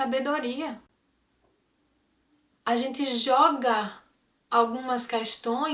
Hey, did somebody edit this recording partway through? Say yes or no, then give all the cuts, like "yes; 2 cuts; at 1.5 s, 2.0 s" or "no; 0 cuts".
no; 0 cuts